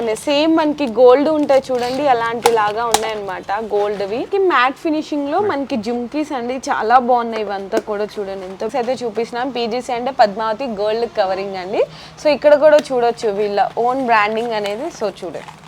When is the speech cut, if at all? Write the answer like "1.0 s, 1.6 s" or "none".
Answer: 4.3 s, 8.7 s